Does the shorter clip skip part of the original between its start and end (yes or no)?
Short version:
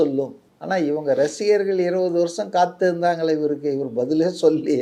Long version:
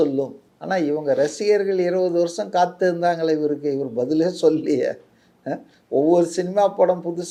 no